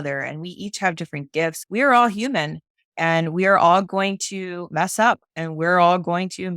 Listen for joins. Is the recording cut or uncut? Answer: cut